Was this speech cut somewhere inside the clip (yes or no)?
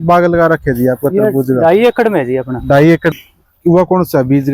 yes